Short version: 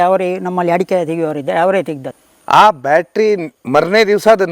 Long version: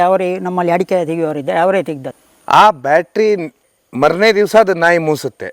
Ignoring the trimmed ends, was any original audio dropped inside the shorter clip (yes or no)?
yes